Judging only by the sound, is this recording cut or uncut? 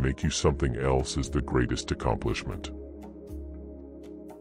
uncut